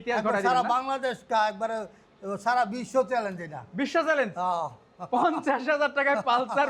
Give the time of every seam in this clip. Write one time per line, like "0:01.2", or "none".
none